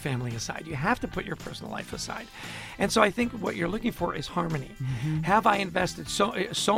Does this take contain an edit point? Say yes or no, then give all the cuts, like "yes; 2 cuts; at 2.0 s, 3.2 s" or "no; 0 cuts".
no; 0 cuts